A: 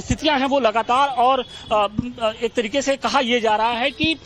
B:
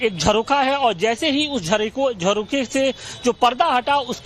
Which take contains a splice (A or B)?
B